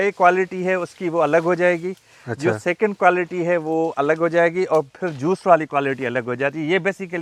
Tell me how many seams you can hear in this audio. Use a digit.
0